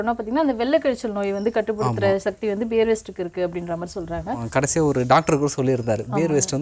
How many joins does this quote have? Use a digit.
1